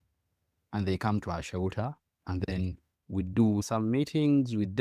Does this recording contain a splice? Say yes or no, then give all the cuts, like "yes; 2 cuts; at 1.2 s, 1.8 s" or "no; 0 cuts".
yes; 1 cut; at 3.7 s